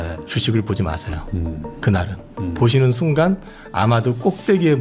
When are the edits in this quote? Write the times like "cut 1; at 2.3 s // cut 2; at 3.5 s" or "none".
none